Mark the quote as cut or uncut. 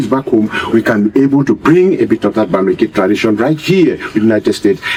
uncut